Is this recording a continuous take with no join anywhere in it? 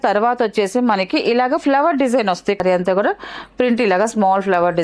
no; 1 cut; at 2.6 s

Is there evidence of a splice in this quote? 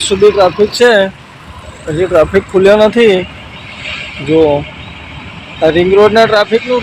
no; 0 cuts

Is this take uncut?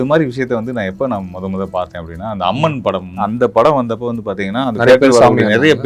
no; 1 cut; at 3.2 s

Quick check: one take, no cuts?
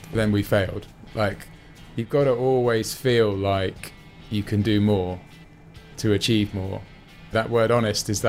no; 1 cut; at 7.3 s

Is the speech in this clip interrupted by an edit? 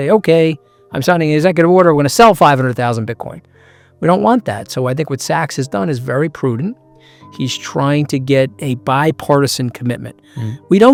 no; 0 cuts

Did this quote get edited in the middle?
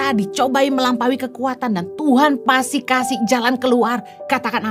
no; 0 cuts

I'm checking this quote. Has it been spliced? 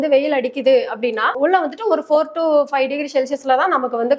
yes; 1 cut; at 1.4 s

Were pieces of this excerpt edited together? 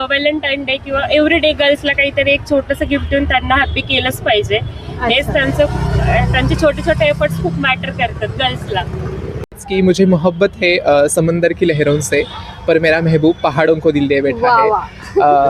yes; 1 cut; at 9.6 s

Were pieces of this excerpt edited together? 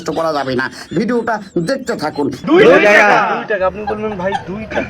yes; 1 cut; at 2.4 s

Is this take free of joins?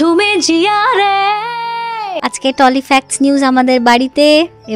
no; 1 cut; at 2.2 s

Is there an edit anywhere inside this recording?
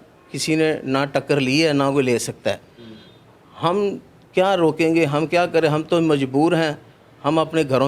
no; 0 cuts

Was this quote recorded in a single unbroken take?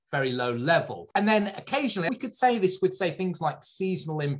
no; 2 cuts; at 1.0 s, 2.1 s

